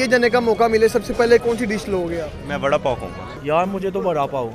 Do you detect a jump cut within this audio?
yes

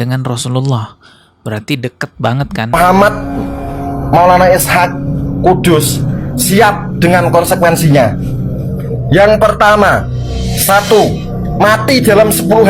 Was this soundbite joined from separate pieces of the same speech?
yes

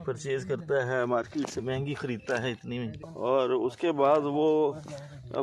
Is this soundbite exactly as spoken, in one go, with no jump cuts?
no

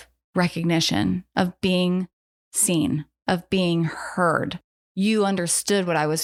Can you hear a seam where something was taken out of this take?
no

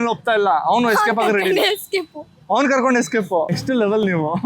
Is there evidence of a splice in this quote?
yes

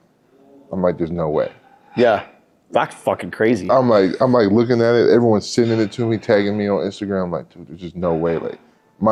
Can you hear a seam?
no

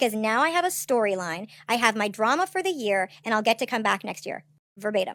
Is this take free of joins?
yes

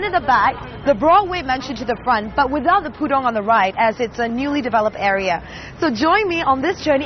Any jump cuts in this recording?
no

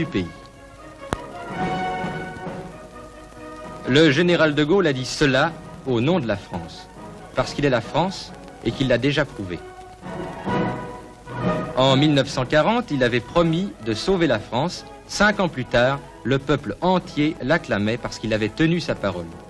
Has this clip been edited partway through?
yes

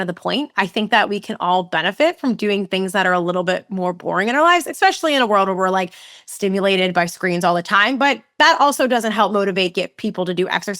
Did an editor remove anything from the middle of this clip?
no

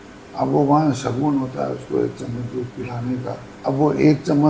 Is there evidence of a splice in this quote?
yes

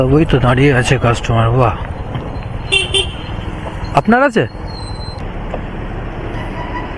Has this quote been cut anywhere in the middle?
yes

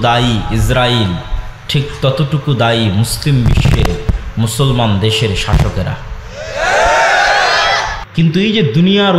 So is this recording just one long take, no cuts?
no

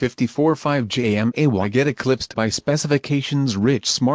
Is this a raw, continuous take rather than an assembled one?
yes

